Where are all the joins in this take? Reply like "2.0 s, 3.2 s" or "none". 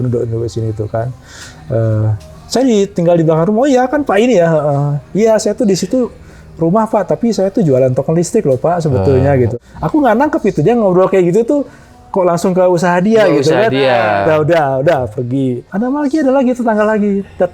9.5 s, 15.6 s